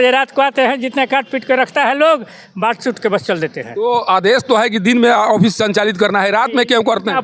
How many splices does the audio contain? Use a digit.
0